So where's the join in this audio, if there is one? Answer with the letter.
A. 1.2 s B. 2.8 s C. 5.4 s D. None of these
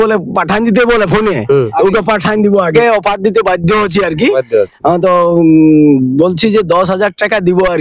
B